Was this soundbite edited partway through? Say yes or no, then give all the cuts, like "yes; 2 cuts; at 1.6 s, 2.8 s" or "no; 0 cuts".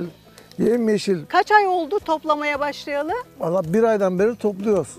yes; 1 cut; at 1.3 s